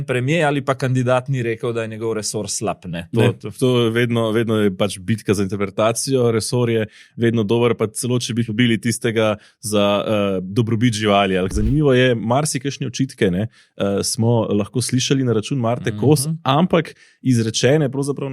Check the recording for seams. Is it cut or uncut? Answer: cut